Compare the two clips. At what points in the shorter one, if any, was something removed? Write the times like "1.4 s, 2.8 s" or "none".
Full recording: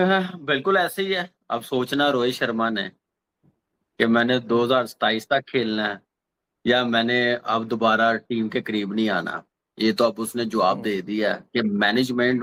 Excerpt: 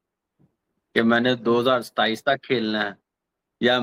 none